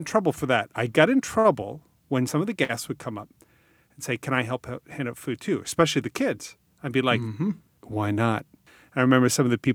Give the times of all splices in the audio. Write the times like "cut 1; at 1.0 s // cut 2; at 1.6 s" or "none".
cut 1; at 2.3 s // cut 2; at 7.7 s // cut 3; at 8.6 s